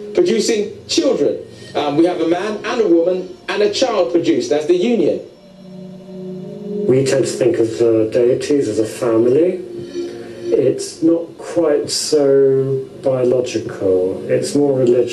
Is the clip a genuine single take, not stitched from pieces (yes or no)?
no